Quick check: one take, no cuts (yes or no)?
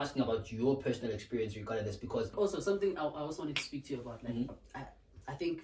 no